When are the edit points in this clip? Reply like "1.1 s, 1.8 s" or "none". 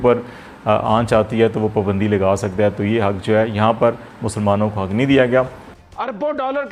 5.5 s